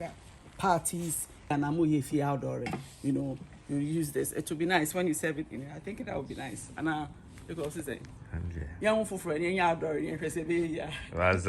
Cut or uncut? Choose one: cut